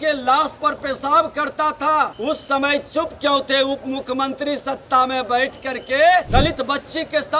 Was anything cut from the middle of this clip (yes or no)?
yes